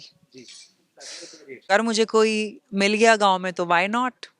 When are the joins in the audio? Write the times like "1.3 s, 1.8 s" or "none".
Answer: 1.7 s